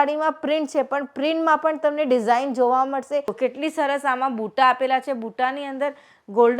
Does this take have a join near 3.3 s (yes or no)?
yes